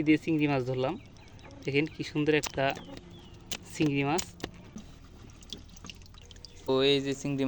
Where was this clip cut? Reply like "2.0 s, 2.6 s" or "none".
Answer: 4.8 s, 6.7 s